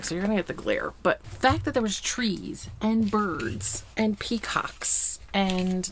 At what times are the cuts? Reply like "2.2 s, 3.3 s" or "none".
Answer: 1.2 s